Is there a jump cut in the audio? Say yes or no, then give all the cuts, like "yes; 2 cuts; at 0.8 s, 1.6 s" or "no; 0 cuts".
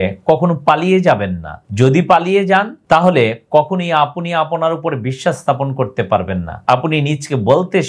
yes; 1 cut; at 6.5 s